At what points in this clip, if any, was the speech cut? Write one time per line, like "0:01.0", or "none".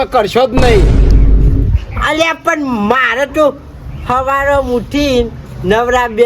none